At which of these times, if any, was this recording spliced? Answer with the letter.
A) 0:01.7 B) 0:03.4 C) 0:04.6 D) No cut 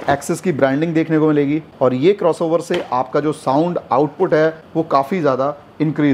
D